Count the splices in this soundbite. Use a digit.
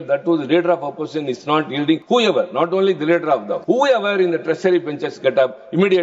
2